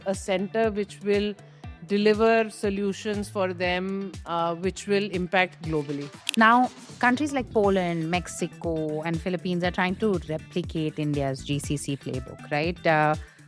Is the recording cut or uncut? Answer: cut